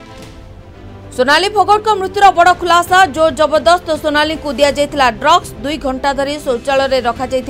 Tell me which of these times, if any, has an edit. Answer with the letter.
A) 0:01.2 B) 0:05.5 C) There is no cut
A